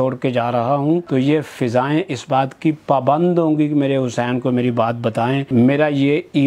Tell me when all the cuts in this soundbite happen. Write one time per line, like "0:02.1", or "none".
0:01.0
0:05.5